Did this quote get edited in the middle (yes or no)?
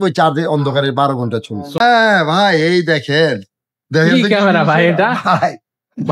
yes